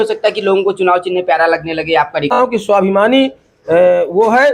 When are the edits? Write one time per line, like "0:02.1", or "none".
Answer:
0:02.3

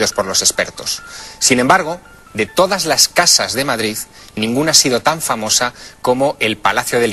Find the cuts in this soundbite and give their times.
0:01.4

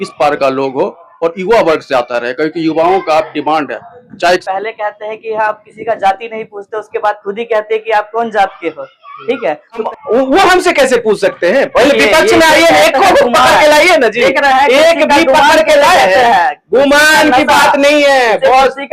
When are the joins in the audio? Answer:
0:04.4
0:09.9

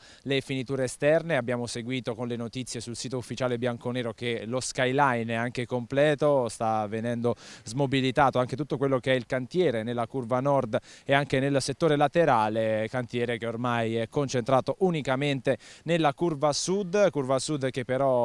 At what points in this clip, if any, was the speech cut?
0:14.4

